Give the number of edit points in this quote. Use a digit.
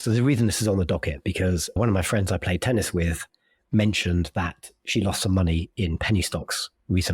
1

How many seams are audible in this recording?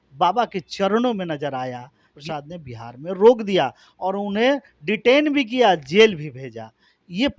1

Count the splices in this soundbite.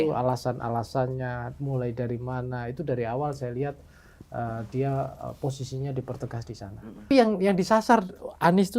1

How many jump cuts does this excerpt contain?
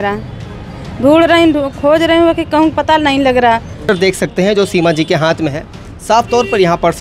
1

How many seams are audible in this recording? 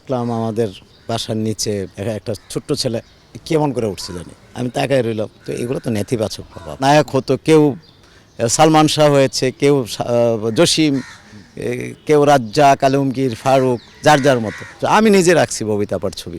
4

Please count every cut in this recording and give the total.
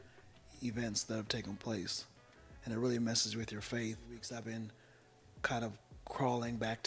1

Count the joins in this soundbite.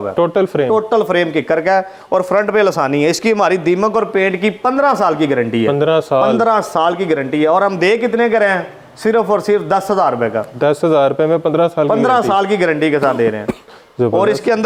0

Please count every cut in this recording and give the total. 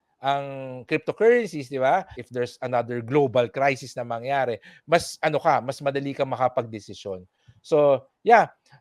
1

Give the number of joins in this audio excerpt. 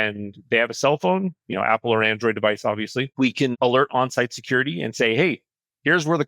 1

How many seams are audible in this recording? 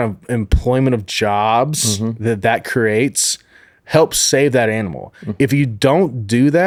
0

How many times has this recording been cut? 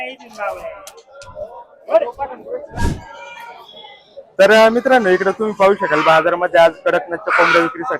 1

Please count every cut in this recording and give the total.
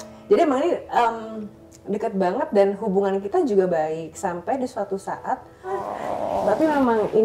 1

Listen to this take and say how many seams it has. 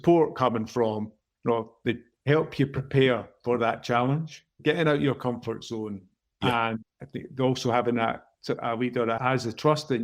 2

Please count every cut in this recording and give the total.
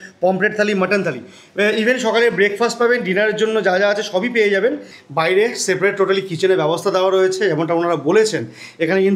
1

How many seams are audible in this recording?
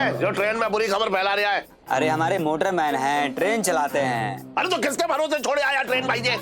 1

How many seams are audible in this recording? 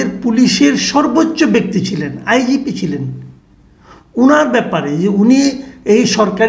0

